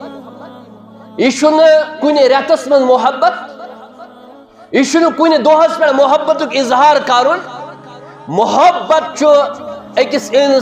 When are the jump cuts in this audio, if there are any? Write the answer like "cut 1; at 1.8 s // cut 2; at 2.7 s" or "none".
none